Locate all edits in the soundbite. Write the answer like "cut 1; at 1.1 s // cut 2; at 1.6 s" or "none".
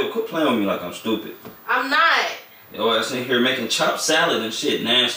none